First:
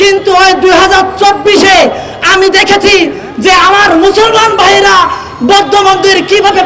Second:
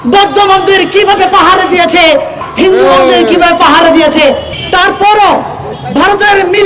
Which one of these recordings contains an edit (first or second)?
second